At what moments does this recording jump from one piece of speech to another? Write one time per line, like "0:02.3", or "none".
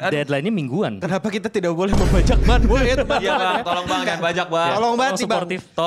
0:01.0